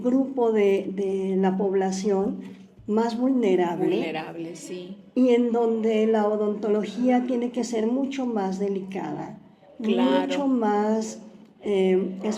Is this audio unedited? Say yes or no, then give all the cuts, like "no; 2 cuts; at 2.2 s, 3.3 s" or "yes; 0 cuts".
yes; 0 cuts